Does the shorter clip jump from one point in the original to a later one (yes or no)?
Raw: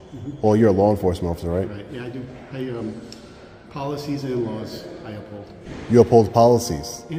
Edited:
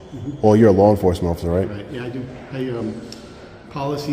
no